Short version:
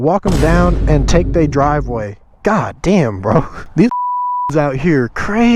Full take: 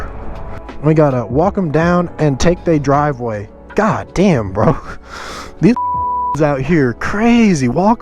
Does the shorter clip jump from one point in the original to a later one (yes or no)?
yes